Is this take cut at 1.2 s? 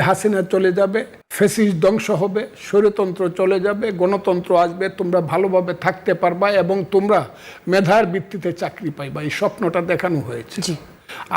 yes; 1 cut; at 1.2 s

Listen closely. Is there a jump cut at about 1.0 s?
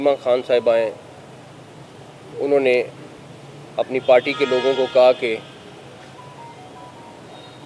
no; 0 cuts

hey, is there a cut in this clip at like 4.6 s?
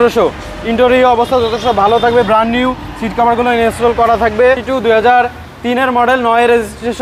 yes; 1 cut; at 4.6 s

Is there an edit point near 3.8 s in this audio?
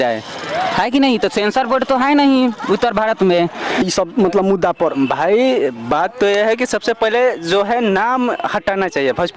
yes; 1 cut; at 3.8 s

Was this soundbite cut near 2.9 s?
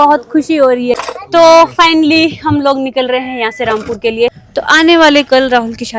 no; 2 cuts; at 1.0 s, 4.4 s

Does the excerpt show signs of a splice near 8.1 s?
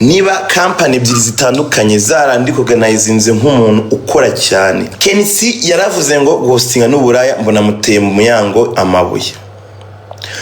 no; 1 cut; at 4.9 s

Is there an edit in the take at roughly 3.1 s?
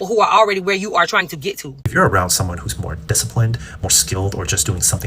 no; 1 cut; at 1.7 s

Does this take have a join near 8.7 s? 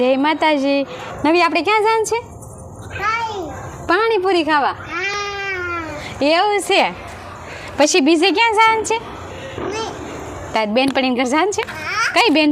no; 1 cut; at 1.0 s

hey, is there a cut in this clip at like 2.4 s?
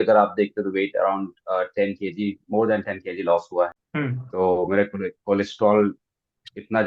no; 1 cut; at 3.8 s

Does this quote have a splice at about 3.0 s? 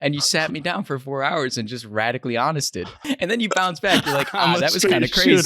yes; 1 cut; at 3.0 s

